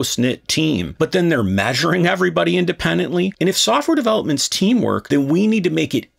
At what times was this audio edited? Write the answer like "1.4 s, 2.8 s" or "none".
3.3 s, 5.0 s